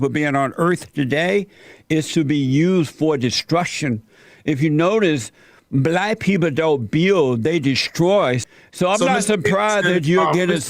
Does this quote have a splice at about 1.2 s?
no; 1 cut; at 8.4 s

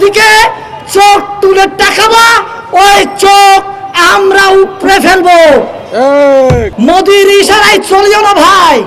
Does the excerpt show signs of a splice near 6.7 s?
yes; 1 cut; at 6.7 s

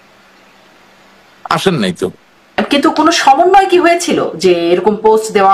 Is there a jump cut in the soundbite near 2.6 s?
yes; 1 cut; at 2.6 s

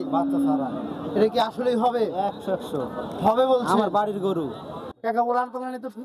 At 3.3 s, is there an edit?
no; 1 cut; at 4.8 s

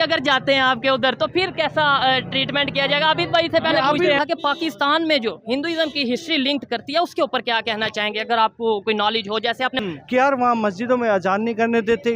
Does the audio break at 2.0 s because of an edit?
no; 2 cuts; at 4.2 s, 9.7 s

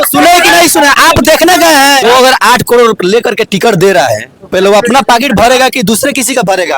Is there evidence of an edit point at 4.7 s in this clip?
no; 1 cut; at 2.0 s

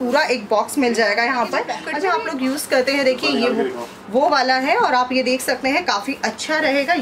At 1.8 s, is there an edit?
yes; 1 cut; at 1.8 s

